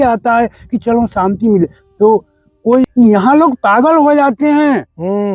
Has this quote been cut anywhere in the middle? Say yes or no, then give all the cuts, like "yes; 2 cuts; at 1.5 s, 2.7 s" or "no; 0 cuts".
yes; 1 cut; at 2.9 s